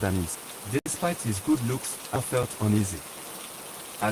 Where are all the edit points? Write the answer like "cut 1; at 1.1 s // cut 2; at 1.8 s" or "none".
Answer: cut 1; at 0.9 s // cut 2; at 2.2 s